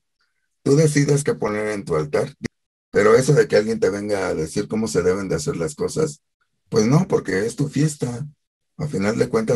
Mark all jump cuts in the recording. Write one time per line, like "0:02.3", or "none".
0:02.3